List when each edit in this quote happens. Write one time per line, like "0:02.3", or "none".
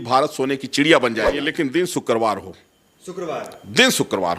0:01.4